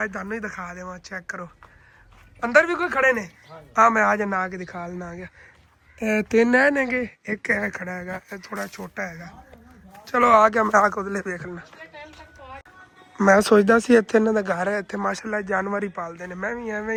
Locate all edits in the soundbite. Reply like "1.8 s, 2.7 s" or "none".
none